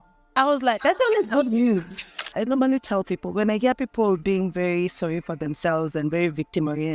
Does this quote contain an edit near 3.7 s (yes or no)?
no